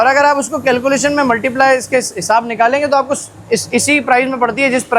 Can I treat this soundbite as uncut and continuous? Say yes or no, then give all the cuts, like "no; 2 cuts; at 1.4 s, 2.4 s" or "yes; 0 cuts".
yes; 0 cuts